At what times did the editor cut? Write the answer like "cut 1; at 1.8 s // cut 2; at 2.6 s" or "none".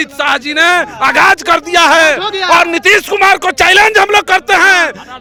none